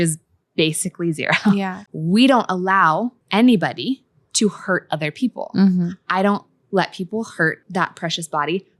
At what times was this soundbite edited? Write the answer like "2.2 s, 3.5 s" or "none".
1.8 s, 3.2 s, 7.6 s